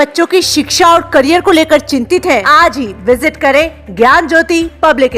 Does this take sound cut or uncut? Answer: cut